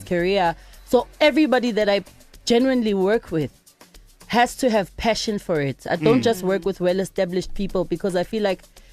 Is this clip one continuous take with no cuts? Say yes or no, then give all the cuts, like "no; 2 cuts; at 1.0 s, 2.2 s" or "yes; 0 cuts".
yes; 0 cuts